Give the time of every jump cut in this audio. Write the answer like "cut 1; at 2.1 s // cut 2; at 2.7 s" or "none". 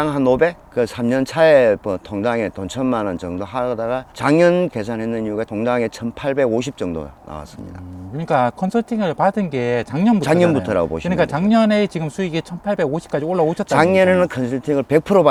none